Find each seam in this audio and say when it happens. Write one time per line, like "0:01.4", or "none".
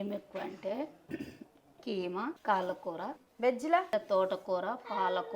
0:02.4
0:03.2
0:03.9